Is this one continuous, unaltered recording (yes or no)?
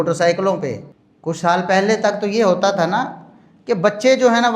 yes